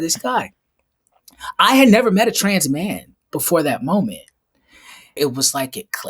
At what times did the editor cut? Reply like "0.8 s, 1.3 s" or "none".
5.2 s